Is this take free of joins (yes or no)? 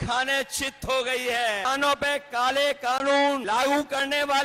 no